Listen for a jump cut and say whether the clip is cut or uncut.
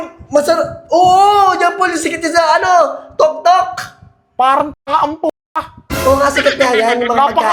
uncut